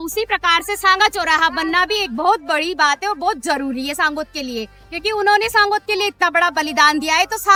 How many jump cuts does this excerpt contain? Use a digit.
0